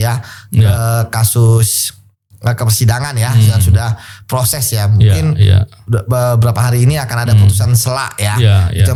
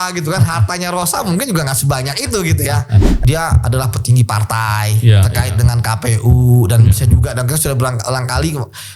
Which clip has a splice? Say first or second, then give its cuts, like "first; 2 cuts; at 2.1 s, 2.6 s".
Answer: second; 1 cut; at 3.1 s